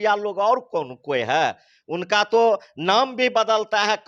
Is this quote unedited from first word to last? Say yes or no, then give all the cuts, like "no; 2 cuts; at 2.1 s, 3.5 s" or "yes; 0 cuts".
yes; 0 cuts